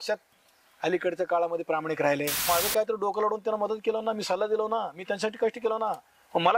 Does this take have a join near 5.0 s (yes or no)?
no